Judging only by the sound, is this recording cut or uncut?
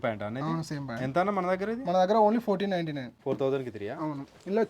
cut